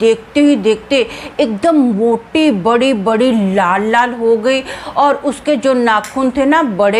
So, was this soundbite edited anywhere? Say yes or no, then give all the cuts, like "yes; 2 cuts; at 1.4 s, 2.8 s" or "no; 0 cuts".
no; 0 cuts